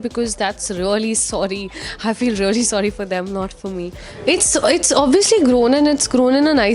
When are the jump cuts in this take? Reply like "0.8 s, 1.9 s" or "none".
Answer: 4.0 s